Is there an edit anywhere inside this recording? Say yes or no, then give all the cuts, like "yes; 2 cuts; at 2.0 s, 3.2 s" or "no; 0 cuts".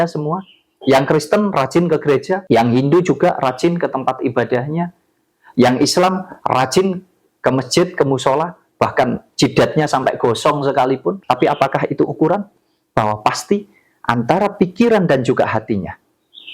yes; 2 cuts; at 2.4 s, 11.2 s